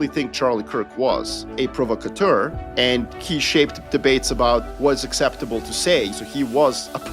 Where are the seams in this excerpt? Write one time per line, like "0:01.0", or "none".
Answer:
0:01.4
0:02.9
0:04.7
0:06.1